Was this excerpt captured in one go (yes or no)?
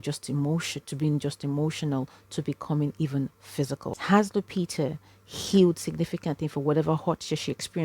no